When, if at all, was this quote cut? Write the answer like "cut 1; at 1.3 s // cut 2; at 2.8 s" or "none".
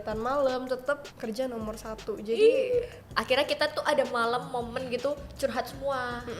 cut 1; at 3.0 s